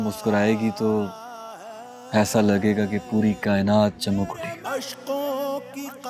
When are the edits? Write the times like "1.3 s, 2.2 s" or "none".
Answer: 4.6 s